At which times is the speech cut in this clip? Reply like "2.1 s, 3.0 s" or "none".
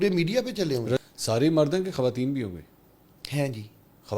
1.0 s